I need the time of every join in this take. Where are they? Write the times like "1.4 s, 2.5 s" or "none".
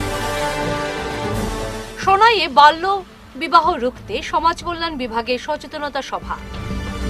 1.5 s

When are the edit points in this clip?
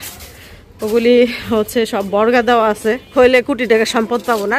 3.1 s

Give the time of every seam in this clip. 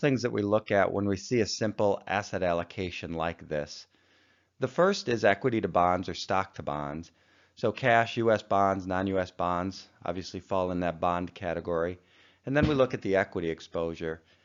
none

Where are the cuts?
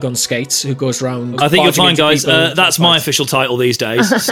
1.4 s

